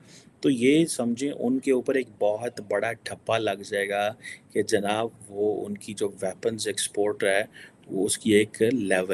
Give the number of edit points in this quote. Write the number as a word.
zero